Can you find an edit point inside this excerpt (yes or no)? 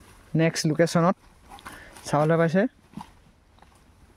no